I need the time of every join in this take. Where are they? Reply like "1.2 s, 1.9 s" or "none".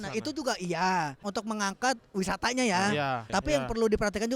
1.2 s, 3.3 s